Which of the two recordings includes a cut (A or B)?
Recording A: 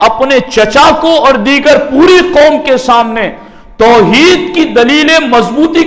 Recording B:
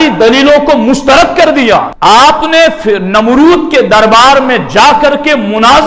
B